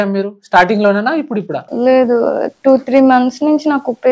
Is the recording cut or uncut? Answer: uncut